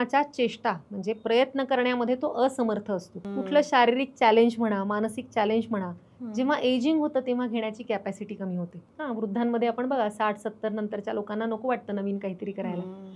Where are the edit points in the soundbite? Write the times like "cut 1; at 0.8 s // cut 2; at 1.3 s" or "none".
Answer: cut 1; at 3.2 s // cut 2; at 8.8 s